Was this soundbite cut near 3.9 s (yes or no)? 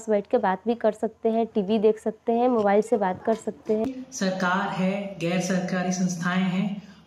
yes